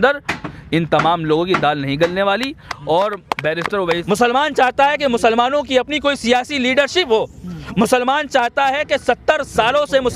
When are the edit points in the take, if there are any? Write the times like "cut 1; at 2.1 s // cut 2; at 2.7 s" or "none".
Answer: cut 1; at 4.0 s